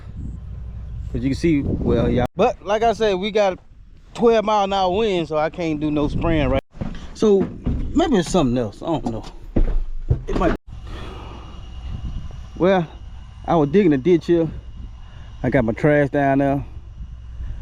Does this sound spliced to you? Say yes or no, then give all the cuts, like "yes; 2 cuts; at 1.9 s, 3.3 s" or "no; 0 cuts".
yes; 3 cuts; at 2.3 s, 6.6 s, 10.6 s